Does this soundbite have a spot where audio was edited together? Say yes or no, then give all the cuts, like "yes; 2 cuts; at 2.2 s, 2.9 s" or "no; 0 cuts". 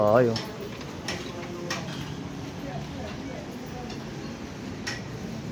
no; 0 cuts